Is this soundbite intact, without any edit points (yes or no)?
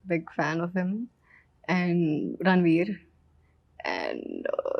yes